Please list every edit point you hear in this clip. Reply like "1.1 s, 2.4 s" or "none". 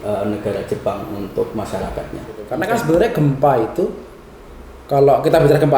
2.5 s